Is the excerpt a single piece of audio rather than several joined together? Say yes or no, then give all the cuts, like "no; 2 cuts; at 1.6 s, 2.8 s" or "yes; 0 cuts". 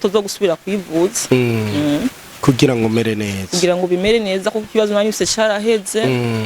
yes; 0 cuts